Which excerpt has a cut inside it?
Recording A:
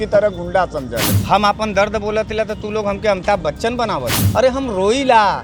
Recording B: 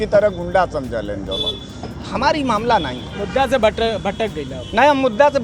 A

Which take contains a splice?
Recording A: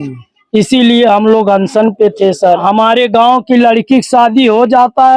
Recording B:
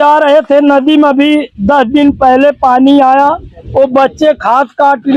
A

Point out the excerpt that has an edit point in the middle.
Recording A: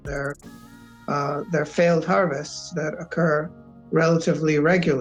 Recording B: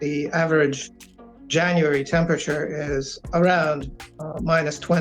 B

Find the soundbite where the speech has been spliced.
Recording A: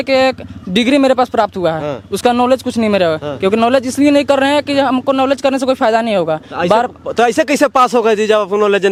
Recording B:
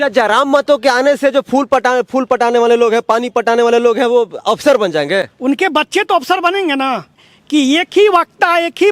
B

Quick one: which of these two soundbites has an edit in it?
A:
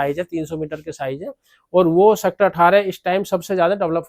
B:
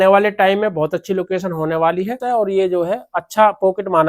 B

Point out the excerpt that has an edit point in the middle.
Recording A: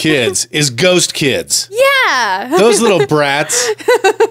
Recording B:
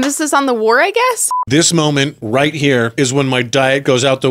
B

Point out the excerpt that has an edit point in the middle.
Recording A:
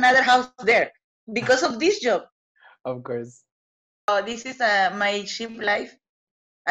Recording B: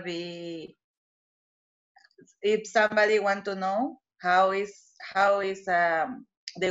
A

